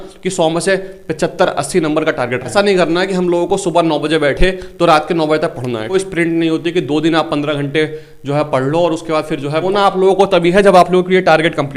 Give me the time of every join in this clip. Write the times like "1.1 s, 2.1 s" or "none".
2.5 s, 5.9 s, 9.7 s